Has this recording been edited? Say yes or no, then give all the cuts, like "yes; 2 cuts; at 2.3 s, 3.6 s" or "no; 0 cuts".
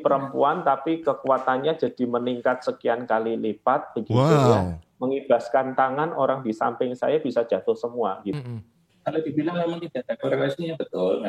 yes; 1 cut; at 8.4 s